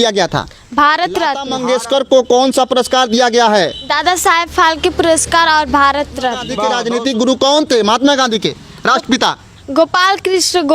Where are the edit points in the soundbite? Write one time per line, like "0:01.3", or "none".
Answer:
0:01.5
0:06.6